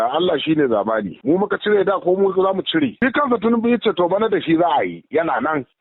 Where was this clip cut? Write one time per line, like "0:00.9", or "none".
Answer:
0:02.9